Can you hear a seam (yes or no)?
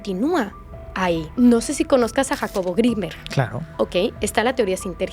yes